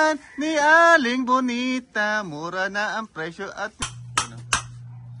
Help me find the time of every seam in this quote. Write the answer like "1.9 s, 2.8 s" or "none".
3.8 s